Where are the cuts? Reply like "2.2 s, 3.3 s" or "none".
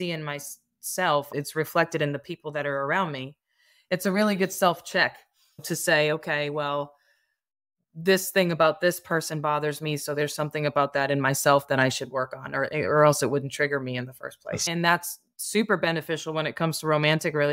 1.3 s, 5.6 s, 14.7 s